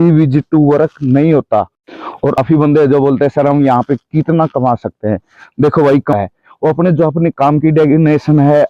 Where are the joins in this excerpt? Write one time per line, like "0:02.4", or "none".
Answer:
0:02.4
0:06.1